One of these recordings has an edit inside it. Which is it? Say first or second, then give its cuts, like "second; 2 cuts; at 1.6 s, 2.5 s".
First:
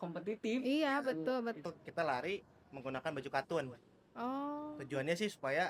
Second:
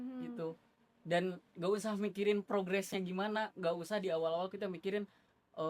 first; 1 cut; at 1.6 s